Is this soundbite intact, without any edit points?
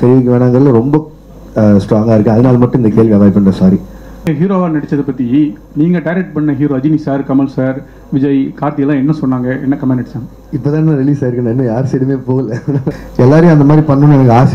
no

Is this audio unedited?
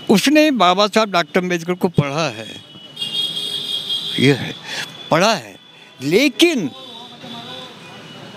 yes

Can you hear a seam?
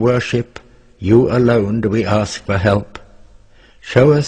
yes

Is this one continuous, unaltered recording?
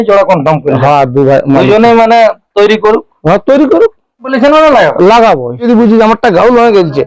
no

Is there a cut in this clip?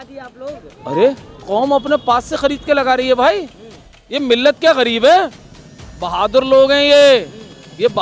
no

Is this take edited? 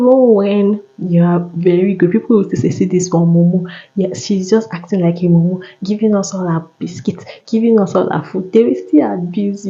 no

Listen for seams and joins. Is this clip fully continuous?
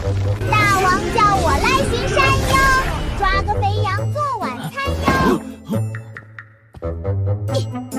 yes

